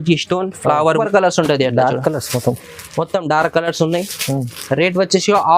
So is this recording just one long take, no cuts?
no; 1 cut; at 1.0 s

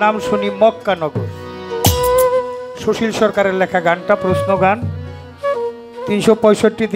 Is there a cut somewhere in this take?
no; 0 cuts

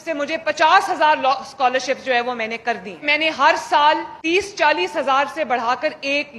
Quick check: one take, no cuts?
no; 2 cuts; at 3.0 s, 4.1 s

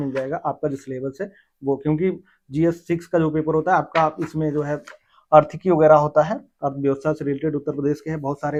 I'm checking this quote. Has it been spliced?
no; 0 cuts

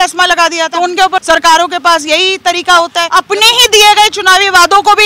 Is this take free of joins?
no; 2 cuts; at 1.0 s, 3.0 s

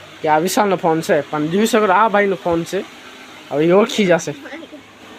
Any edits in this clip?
no; 0 cuts

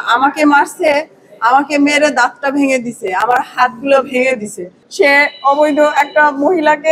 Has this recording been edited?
yes; 1 cut; at 4.8 s

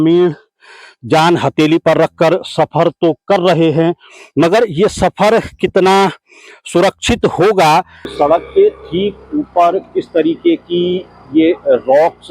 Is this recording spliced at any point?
yes; 1 cut; at 8.0 s

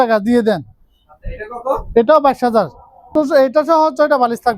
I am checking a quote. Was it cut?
yes; 1 cut; at 3.1 s

